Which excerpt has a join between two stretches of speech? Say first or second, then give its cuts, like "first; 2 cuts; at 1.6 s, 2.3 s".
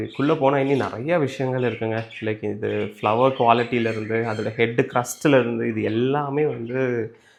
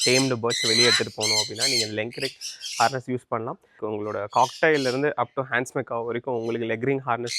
second; 1 cut; at 3.8 s